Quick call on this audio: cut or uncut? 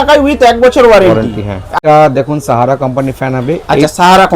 cut